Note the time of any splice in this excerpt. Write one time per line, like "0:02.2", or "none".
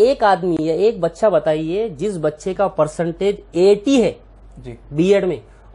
none